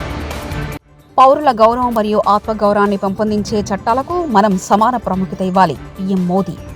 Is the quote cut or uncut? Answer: cut